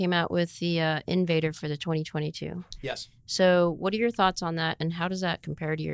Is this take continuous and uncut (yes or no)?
yes